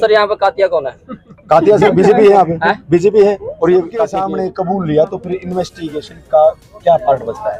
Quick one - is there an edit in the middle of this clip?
yes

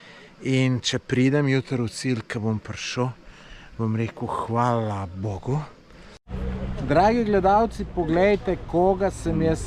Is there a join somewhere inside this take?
yes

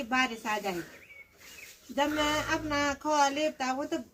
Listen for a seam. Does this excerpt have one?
no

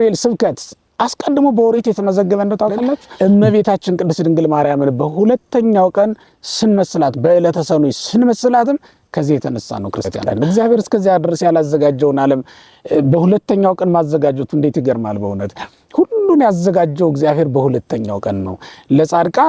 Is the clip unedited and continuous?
no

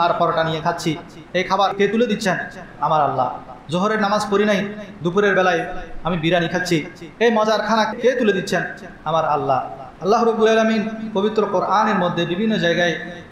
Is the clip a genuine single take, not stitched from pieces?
no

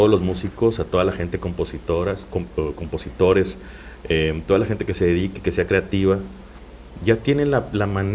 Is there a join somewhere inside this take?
no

